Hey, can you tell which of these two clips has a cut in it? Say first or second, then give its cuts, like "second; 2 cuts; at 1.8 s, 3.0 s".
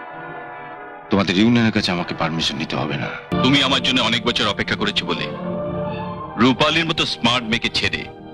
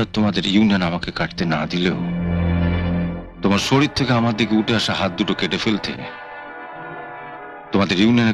first; 1 cut; at 3.3 s